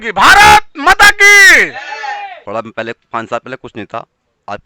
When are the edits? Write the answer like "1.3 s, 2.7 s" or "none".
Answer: 2.3 s